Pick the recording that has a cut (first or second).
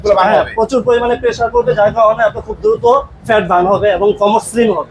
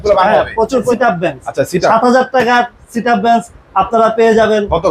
second